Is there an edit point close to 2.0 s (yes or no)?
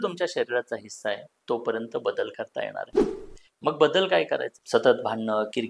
no